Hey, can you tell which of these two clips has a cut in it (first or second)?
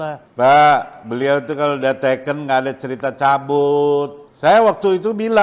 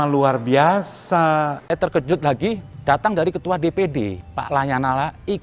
second